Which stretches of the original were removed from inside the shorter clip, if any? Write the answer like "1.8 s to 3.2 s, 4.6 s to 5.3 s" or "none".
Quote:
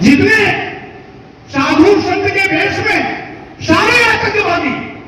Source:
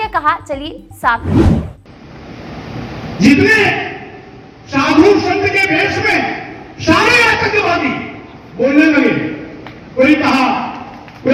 none